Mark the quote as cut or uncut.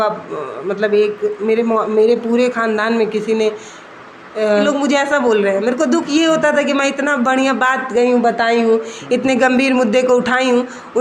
cut